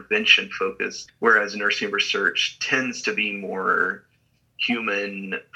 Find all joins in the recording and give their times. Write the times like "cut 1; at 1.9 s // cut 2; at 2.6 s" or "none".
cut 1; at 1.0 s